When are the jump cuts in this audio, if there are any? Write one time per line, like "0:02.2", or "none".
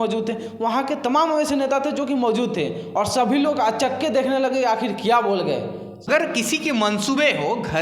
0:06.1